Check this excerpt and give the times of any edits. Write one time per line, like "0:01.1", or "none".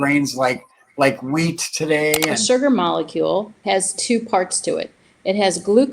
0:02.3
0:03.5